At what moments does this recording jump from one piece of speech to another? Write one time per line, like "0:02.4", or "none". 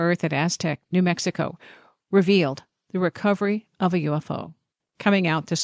0:04.7